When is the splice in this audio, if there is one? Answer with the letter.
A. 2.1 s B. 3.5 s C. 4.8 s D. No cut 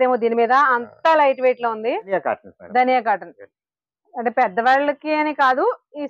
A